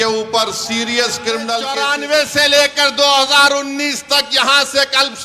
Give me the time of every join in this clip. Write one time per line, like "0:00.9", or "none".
0:01.8